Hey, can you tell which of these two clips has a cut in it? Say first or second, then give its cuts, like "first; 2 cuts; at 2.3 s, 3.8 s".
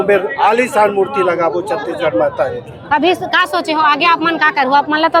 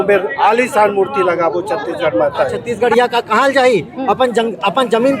second; 1 cut; at 2.6 s